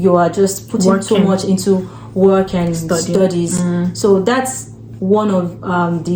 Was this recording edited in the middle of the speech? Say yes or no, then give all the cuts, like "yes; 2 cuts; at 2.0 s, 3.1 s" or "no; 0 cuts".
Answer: no; 0 cuts